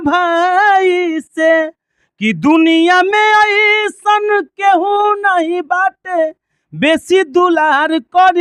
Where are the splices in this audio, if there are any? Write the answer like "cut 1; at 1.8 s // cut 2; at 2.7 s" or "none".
none